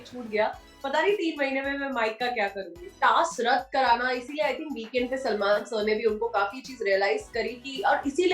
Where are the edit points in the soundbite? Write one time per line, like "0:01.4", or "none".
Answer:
0:03.0